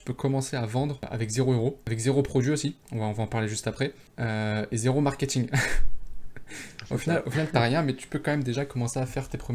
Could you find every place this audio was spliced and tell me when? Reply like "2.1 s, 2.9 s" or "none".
1.1 s, 1.8 s, 2.8 s, 4.1 s